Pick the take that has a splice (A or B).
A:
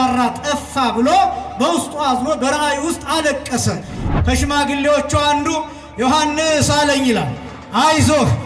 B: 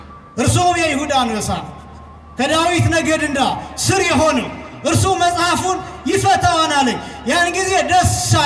A